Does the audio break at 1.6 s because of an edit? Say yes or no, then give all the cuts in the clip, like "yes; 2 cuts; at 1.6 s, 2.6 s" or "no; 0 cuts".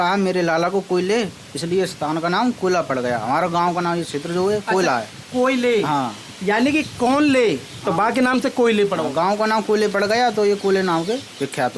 no; 0 cuts